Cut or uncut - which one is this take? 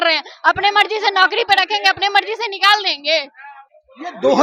uncut